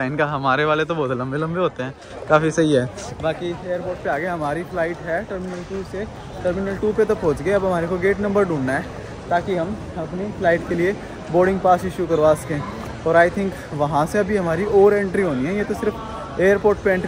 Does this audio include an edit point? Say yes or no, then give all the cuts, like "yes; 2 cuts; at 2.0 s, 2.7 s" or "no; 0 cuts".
no; 0 cuts